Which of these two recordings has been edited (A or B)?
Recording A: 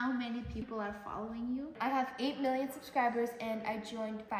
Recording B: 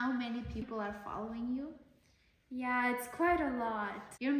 A